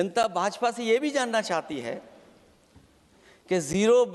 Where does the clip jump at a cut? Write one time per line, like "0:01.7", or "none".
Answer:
none